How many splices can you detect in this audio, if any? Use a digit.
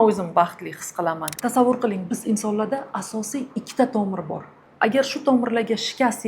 1